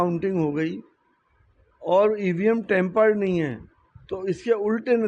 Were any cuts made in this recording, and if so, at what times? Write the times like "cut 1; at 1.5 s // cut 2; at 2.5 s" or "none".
none